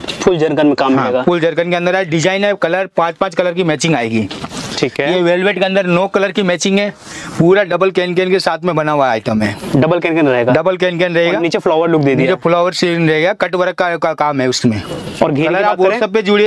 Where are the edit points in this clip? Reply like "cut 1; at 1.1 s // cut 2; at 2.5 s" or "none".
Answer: none